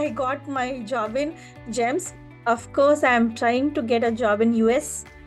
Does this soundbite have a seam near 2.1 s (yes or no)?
yes